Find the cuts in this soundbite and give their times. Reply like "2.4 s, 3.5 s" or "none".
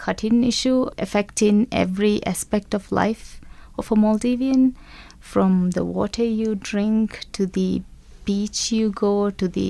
1.0 s